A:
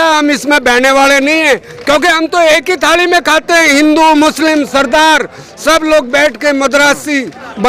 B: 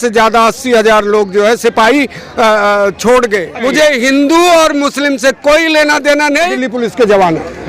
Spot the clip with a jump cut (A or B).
B